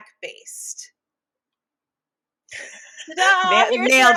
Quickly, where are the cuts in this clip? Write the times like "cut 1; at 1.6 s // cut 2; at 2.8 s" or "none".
none